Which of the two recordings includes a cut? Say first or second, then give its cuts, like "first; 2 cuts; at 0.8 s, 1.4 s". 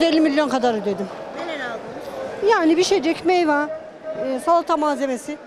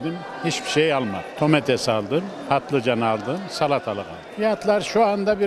second; 2 cuts; at 1.3 s, 4.2 s